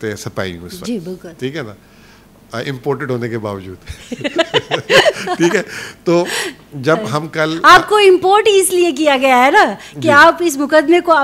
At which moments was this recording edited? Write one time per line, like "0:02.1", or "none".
none